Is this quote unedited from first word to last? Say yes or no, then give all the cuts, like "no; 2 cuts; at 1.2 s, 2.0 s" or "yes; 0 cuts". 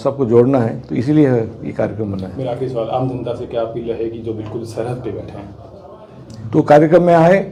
yes; 0 cuts